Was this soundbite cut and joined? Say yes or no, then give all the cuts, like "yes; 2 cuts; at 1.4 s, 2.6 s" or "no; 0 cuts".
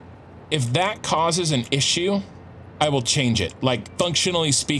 yes; 1 cut; at 3.9 s